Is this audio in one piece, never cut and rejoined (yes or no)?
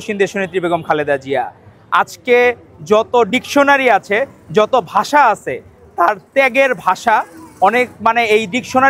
yes